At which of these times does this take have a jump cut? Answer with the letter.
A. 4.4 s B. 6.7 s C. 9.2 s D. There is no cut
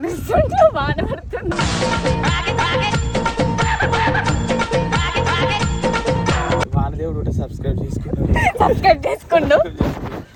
D